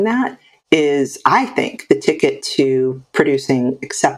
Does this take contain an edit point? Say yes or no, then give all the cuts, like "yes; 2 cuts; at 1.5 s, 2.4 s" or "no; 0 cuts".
no; 0 cuts